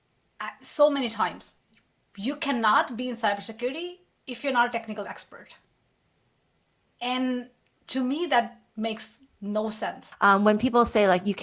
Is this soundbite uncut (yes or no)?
no